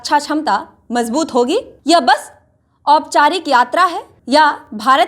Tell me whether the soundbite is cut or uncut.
cut